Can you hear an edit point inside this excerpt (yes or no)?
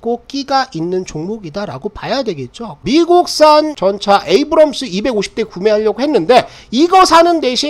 yes